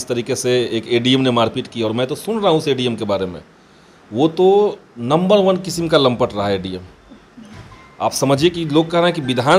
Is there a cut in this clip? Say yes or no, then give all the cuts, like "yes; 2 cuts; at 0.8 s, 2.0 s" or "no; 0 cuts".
no; 0 cuts